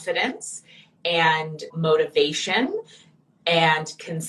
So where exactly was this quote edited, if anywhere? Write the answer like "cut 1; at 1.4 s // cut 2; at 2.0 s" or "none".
cut 1; at 1.6 s